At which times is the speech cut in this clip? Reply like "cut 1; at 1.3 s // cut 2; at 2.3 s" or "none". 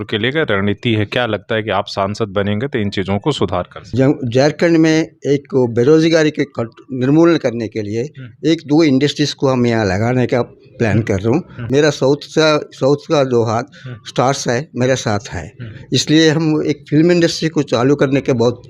cut 1; at 3.8 s // cut 2; at 11.5 s

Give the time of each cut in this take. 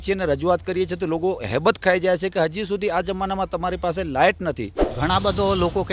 cut 1; at 4.8 s

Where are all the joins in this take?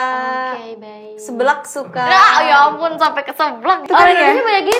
cut 1; at 3.8 s

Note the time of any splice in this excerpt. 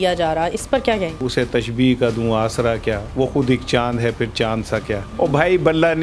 cut 1; at 1.2 s // cut 2; at 3.0 s // cut 3; at 5.1 s

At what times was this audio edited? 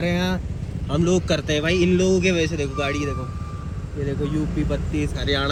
none

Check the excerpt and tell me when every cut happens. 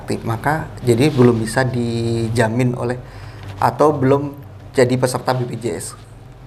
none

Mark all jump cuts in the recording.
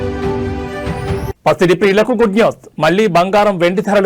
cut 1; at 1.2 s

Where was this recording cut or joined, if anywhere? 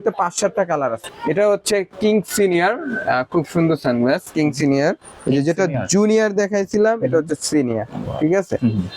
cut 1; at 1.0 s

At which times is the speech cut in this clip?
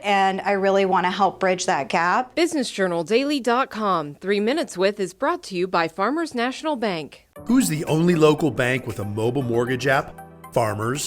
cut 1; at 2.3 s

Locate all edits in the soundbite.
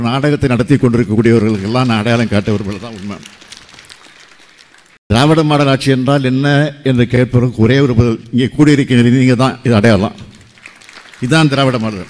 cut 1; at 4.9 s

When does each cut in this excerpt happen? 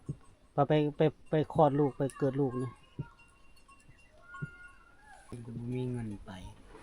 cut 1; at 5.4 s

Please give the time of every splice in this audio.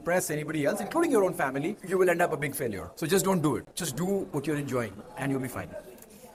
none

